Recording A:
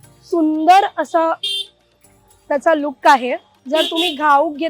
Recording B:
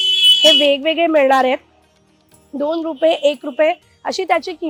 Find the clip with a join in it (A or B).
A